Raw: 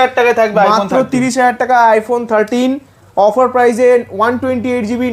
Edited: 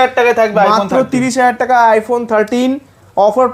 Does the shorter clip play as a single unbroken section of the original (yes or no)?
yes